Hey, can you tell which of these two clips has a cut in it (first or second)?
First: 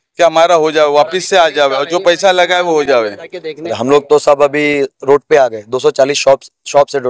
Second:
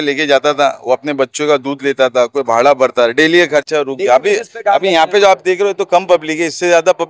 first